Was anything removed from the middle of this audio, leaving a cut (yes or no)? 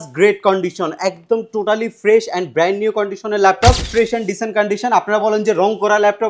yes